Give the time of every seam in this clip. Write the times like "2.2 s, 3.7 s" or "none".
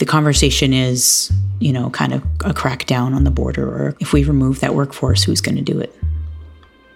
none